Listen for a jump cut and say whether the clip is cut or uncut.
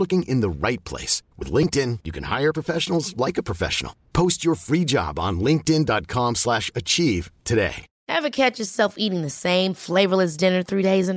cut